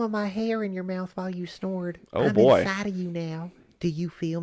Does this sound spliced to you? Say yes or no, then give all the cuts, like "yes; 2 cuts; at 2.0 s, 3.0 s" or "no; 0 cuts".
no; 0 cuts